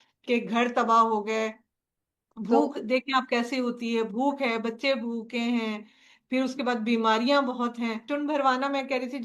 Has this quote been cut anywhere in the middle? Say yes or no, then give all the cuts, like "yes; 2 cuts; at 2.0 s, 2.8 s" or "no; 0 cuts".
yes; 1 cut; at 8.0 s